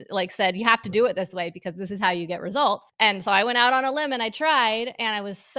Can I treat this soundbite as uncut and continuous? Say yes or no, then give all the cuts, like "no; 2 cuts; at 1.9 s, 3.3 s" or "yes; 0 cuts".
no; 1 cut; at 2.9 s